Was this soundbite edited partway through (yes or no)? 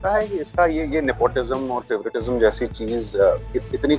no